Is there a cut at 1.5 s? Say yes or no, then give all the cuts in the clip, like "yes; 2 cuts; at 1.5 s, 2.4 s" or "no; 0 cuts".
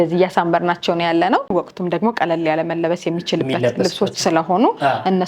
yes; 1 cut; at 1.5 s